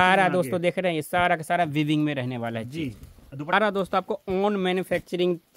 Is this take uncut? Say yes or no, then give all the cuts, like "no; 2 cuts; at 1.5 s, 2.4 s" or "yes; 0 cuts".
no; 1 cut; at 3.5 s